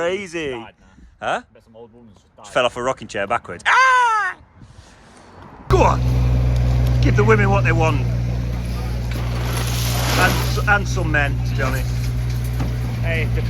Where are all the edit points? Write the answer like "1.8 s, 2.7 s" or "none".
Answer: 5.7 s

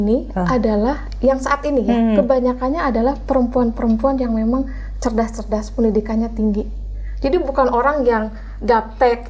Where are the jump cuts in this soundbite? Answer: none

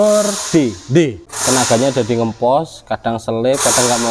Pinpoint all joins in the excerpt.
1.3 s

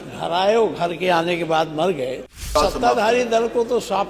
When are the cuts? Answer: 2.5 s

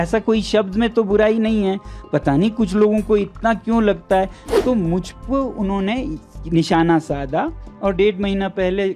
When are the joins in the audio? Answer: 4.4 s

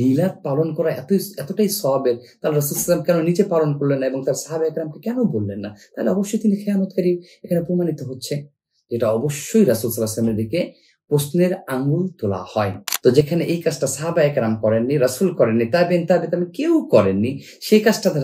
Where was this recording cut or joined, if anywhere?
12.9 s

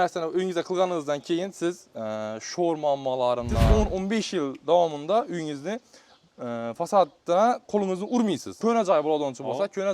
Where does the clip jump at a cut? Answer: 3.7 s, 8.5 s

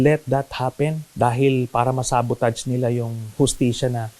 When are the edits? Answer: 1.0 s

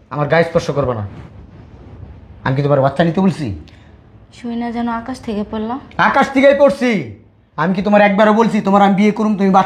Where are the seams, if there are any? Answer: none

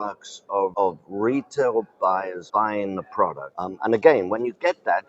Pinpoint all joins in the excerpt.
0.7 s, 2.4 s, 3.5 s

